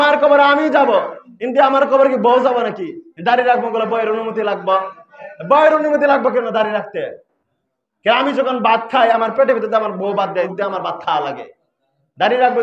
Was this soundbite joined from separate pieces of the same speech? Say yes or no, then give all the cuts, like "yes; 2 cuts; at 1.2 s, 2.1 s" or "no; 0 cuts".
yes; 1 cut; at 10.5 s